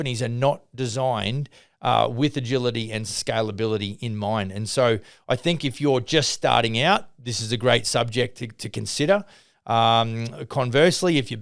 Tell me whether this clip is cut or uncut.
cut